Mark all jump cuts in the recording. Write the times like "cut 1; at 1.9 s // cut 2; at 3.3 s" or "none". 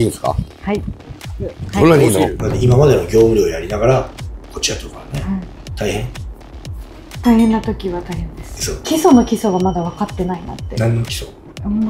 cut 1; at 2.4 s // cut 2; at 8.8 s